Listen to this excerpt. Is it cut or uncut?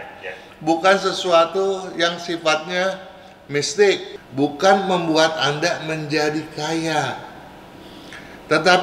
cut